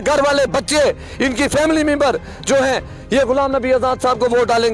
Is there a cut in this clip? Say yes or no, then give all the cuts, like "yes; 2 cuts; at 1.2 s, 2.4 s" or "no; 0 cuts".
no; 0 cuts